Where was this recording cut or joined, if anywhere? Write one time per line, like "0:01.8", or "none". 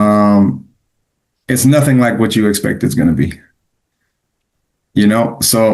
none